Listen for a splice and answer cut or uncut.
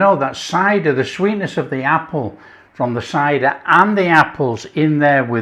uncut